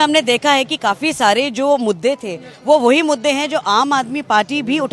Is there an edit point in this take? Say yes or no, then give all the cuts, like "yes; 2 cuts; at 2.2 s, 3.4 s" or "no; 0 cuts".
no; 0 cuts